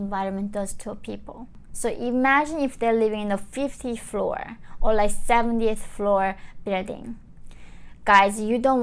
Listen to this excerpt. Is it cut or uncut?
cut